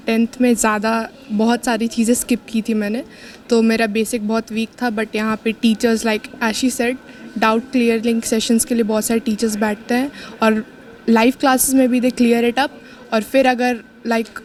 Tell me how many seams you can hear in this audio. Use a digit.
0